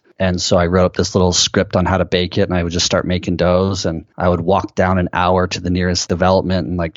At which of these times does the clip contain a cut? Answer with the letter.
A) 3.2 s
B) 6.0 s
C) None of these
B